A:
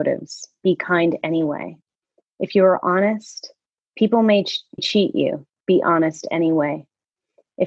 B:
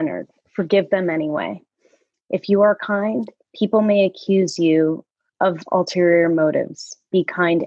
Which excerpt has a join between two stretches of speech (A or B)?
A